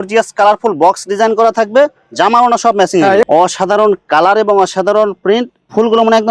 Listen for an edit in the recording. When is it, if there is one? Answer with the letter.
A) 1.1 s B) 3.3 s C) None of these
B